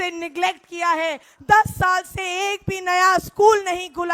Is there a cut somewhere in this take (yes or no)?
yes